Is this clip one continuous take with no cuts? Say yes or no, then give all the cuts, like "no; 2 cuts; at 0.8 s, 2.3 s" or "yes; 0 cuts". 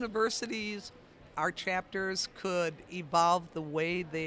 yes; 0 cuts